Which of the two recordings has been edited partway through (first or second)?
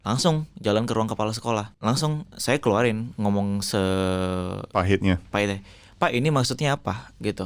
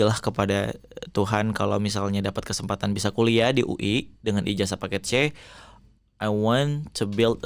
first